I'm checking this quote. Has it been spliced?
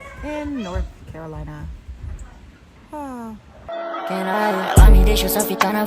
yes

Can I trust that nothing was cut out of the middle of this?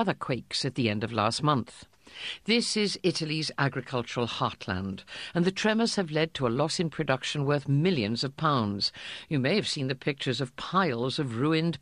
no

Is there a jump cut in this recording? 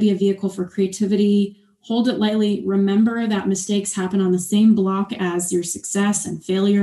no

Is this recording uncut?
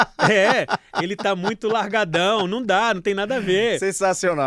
yes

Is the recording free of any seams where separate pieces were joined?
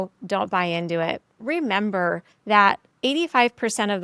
no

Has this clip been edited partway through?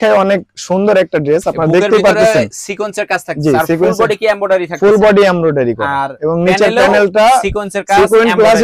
no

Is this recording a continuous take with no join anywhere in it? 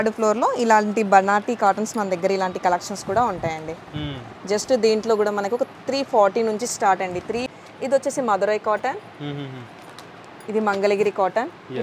no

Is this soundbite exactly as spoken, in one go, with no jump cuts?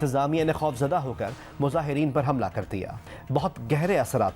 no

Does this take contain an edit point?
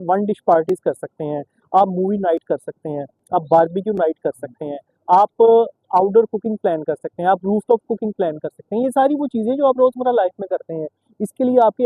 no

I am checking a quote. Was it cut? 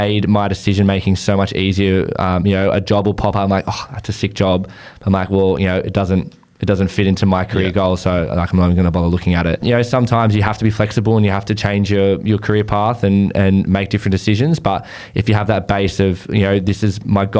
yes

